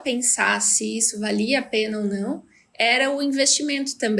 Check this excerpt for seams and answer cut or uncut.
uncut